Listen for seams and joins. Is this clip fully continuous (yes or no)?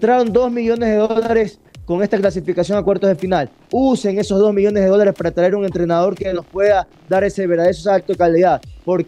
yes